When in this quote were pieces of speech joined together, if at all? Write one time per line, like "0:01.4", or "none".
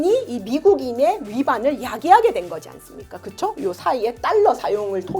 none

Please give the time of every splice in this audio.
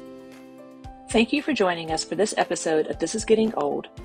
0:01.1

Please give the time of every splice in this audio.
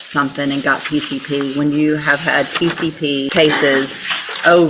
0:03.3

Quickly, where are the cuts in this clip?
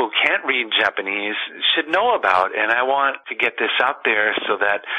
0:03.2

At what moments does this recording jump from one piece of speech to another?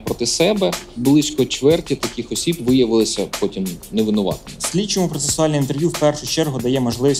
0:00.9
0:04.5

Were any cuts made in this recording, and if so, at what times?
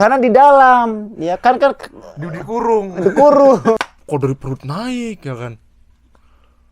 0:03.8

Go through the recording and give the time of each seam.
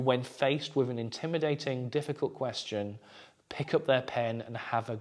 none

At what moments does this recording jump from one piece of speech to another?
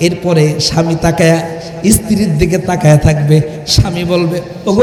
none

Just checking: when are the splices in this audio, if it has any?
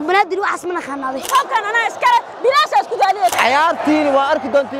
0:01.3
0:03.3

